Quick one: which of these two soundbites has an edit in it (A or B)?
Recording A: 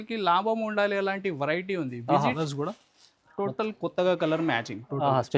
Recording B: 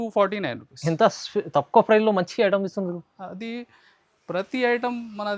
A